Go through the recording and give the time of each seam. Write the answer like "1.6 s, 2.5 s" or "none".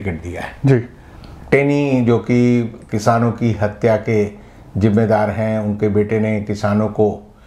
none